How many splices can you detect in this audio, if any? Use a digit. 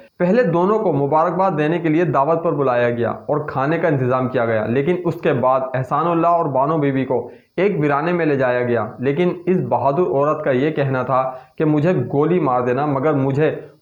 0